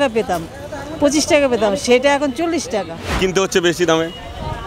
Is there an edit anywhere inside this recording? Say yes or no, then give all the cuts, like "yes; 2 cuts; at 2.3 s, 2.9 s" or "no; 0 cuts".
yes; 1 cut; at 3.2 s